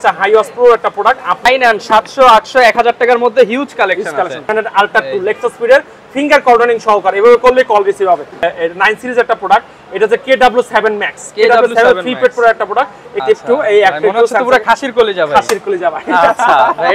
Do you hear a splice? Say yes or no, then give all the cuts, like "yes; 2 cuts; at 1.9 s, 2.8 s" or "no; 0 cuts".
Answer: yes; 4 cuts; at 1.4 s, 4.5 s, 8.4 s, 13.2 s